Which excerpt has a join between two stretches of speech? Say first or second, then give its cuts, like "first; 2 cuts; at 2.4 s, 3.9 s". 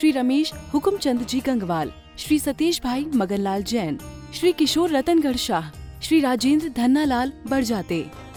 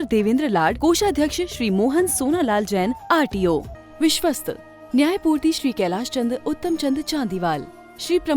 second; 1 cut; at 3.8 s